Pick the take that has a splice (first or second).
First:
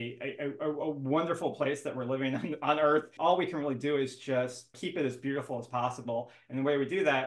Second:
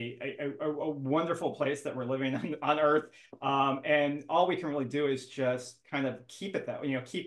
first